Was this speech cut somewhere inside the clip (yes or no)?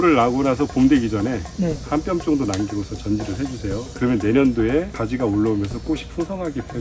no